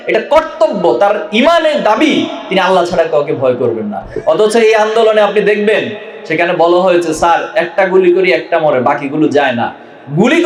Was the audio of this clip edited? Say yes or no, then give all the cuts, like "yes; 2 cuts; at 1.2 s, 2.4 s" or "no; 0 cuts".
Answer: no; 0 cuts